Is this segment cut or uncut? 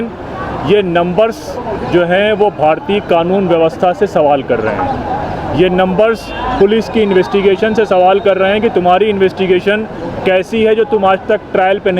uncut